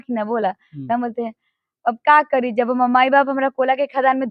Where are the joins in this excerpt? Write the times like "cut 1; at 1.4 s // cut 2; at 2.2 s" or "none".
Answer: none